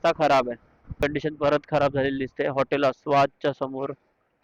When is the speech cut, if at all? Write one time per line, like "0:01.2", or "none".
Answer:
0:01.0